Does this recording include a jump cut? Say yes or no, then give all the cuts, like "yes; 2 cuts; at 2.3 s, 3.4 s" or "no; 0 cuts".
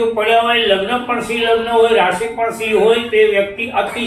no; 0 cuts